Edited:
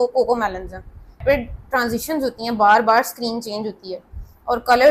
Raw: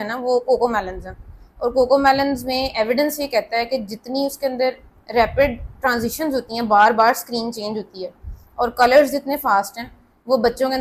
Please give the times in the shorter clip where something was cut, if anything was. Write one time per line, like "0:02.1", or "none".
0:01.2